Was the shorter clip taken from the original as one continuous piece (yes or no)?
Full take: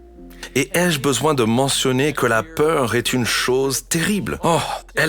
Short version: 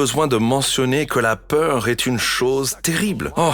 yes